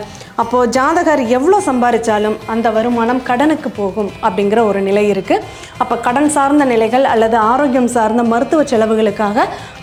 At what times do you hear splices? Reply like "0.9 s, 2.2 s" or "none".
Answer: none